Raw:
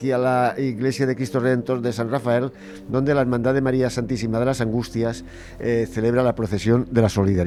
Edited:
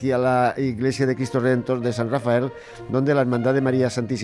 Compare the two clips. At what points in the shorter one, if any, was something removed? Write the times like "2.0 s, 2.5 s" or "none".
none